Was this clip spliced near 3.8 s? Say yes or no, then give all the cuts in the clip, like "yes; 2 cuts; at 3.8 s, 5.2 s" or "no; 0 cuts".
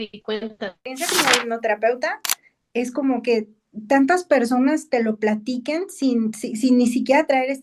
no; 1 cut; at 0.9 s